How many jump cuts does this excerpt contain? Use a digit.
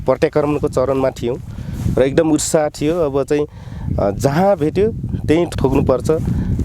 1